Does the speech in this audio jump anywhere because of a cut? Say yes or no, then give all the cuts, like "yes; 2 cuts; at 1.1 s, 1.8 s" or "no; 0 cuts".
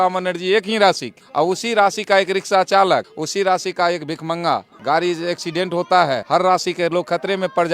yes; 4 cuts; at 1.2 s, 3.2 s, 4.7 s, 6.2 s